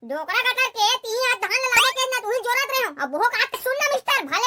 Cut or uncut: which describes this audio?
cut